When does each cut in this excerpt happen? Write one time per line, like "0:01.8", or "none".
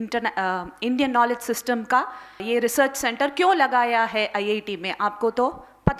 0:02.4